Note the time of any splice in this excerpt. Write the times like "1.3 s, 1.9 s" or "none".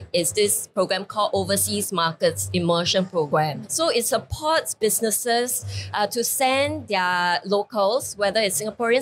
none